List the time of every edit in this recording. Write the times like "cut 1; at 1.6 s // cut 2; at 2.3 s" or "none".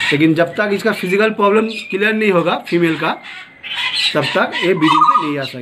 none